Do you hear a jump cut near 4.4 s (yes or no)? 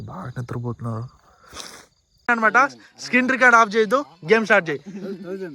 no